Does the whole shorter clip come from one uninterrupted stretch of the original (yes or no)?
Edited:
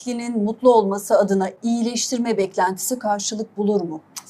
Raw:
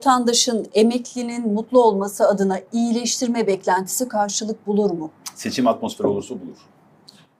yes